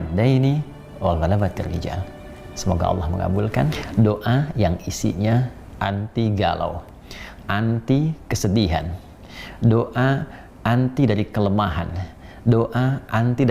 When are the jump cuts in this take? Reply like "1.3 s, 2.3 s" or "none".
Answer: 3.8 s

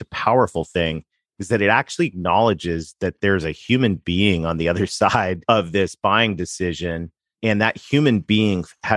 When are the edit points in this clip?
5.4 s

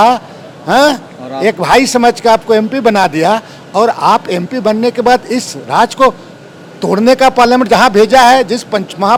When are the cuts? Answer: none

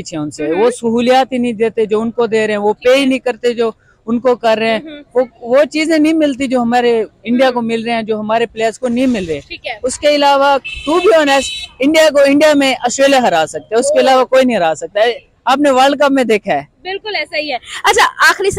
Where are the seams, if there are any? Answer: none

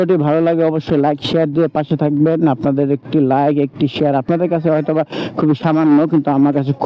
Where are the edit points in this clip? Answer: none

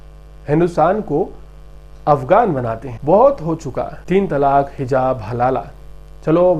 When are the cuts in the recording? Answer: 2.9 s, 4.0 s

